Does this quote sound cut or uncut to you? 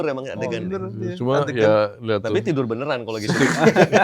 uncut